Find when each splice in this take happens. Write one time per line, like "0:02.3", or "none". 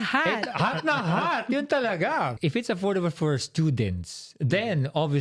0:02.3